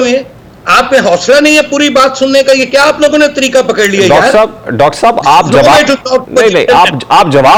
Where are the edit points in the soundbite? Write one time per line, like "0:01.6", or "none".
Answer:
none